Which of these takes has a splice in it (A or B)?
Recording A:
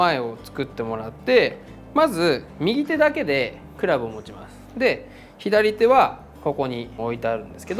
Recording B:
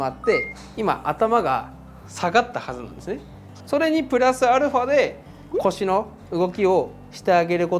B